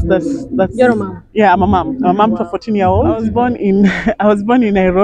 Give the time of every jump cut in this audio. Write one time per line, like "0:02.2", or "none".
0:03.3